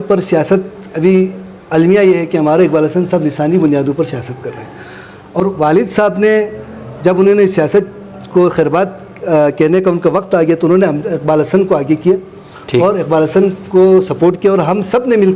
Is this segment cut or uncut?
cut